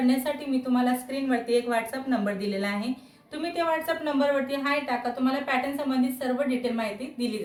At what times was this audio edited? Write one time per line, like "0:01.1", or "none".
none